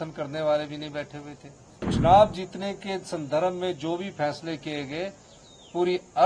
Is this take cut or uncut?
cut